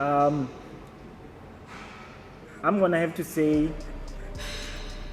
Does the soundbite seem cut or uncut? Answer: uncut